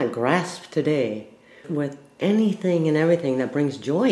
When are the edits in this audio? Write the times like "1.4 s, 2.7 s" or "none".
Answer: 1.6 s